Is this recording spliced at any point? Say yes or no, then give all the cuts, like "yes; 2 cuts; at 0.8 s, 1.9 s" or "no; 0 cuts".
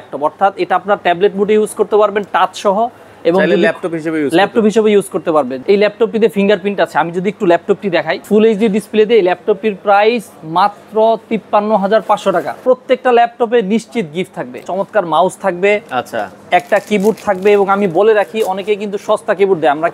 yes; 4 cuts; at 5.5 s, 8.2 s, 12.6 s, 14.6 s